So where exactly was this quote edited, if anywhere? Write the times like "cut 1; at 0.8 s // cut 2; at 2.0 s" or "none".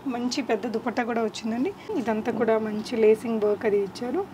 cut 1; at 1.9 s